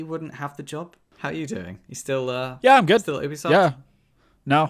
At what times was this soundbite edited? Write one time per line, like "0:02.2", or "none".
0:01.0

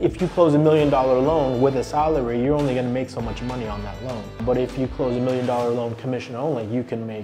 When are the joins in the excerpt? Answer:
none

